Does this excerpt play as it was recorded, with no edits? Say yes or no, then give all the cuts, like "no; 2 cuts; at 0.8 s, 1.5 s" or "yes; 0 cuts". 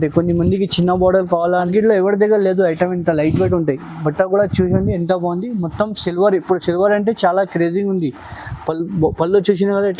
no; 1 cut; at 1.7 s